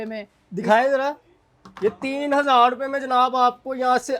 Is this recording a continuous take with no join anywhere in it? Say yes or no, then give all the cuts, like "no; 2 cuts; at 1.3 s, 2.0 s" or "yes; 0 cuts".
yes; 0 cuts